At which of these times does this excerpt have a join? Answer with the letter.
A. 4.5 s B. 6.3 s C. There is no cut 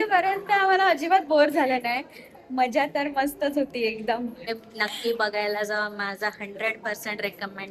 A